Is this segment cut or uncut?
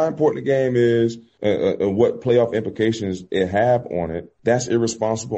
cut